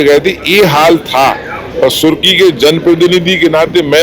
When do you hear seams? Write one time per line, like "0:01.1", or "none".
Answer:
0:01.6